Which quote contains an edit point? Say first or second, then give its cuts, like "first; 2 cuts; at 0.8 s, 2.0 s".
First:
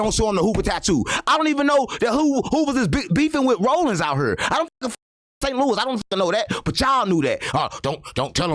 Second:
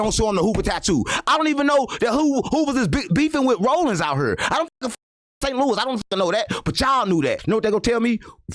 second; 1 cut; at 7.4 s